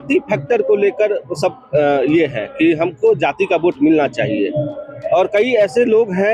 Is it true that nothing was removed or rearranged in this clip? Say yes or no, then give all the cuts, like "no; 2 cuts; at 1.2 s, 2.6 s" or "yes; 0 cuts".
yes; 0 cuts